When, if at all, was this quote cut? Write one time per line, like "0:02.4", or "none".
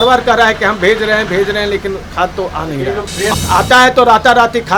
0:03.3